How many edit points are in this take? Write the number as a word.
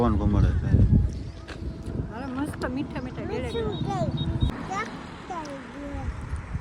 one